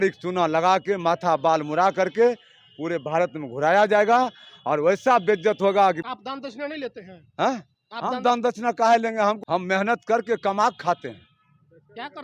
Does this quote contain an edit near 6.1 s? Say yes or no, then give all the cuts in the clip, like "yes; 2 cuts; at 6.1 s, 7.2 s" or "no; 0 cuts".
yes; 2 cuts; at 6.1 s, 9.4 s